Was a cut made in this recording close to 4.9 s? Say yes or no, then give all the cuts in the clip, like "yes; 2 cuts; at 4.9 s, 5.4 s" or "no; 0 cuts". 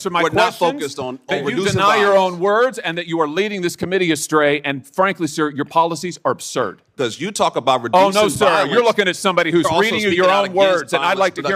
no; 1 cut; at 6.8 s